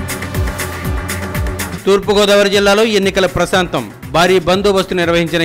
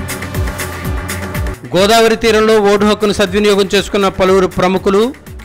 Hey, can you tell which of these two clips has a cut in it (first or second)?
first